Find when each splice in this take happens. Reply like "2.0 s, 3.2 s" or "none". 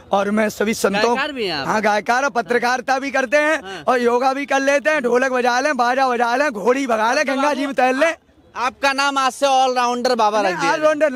none